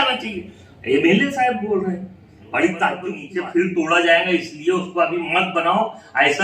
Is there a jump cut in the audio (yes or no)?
yes